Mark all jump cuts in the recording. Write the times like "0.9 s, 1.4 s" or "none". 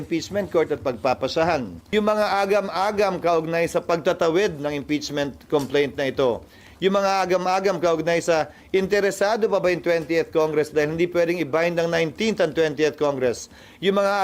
1.8 s